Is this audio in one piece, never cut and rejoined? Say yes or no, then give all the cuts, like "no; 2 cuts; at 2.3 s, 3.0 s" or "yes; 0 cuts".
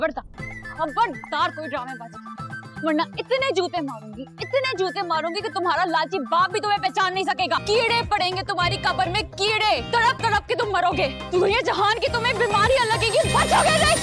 no; 1 cut; at 7.6 s